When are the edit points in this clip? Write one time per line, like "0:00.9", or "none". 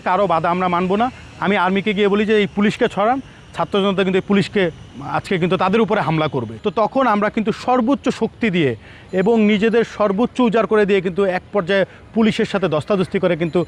0:06.5